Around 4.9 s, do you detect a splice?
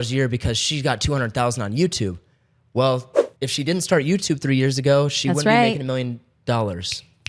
no; 0 cuts

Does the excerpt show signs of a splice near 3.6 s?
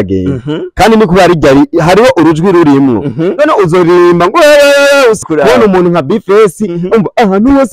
no; 1 cut; at 5.2 s

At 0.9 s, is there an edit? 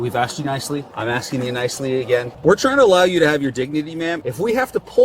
yes; 3 cuts; at 0.9 s, 2.3 s, 4.2 s

